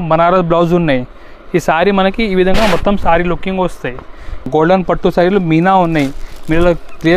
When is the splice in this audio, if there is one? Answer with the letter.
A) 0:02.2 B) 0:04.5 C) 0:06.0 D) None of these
B